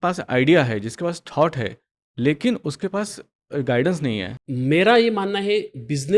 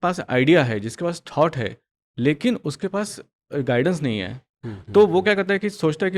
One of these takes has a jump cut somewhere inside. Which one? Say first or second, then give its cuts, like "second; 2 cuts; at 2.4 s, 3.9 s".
first; 1 cut; at 4.4 s